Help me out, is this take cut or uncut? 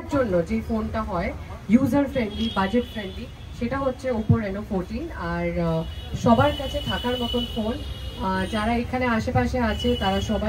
uncut